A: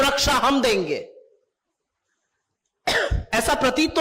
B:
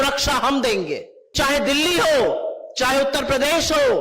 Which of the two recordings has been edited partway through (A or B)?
B